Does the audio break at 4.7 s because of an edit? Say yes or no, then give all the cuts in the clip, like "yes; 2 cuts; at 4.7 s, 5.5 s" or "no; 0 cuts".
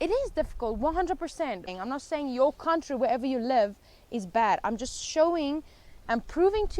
no; 1 cut; at 1.7 s